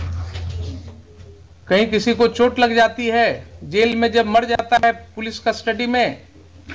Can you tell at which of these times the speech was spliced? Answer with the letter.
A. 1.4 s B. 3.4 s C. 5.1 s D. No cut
D